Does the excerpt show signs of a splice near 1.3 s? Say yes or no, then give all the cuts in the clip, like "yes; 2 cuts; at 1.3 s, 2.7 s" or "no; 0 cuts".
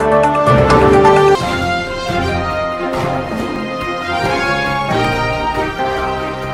no; 0 cuts